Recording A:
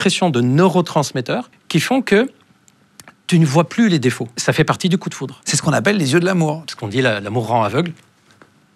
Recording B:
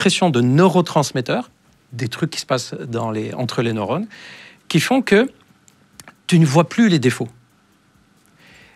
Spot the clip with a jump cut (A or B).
A